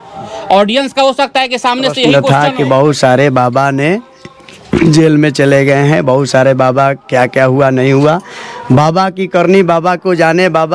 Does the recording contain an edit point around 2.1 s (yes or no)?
yes